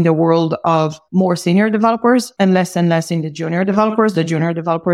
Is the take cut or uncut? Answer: cut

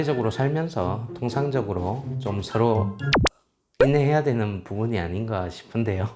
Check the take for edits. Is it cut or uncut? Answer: uncut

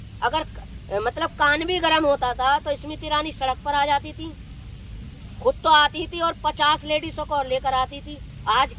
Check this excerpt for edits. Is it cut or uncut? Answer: uncut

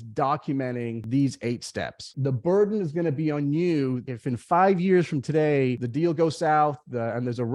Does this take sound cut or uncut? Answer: cut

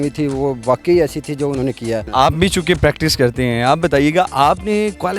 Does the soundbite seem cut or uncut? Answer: cut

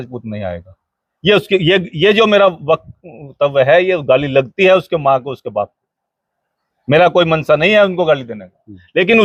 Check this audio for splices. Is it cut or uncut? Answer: uncut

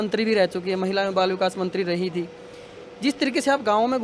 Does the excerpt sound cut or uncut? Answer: uncut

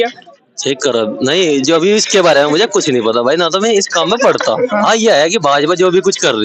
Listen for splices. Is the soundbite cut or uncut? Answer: uncut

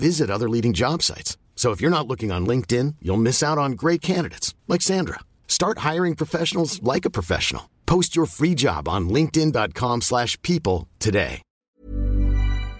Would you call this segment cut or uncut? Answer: cut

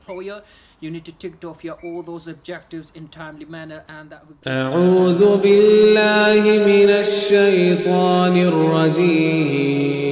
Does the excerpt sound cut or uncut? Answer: cut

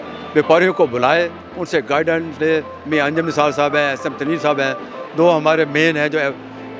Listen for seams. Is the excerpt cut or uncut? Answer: uncut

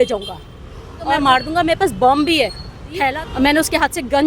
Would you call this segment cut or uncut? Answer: cut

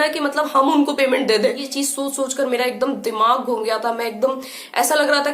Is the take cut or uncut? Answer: cut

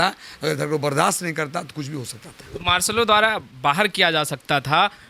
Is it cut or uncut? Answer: uncut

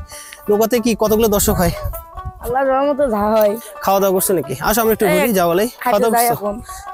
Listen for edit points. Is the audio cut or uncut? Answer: cut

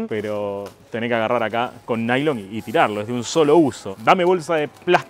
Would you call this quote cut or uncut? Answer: uncut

